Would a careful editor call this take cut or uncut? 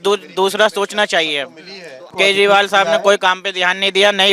cut